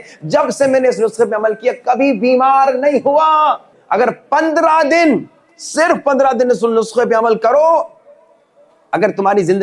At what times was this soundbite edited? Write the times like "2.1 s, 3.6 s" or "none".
3.8 s